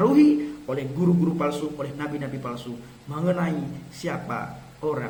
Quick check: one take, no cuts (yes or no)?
yes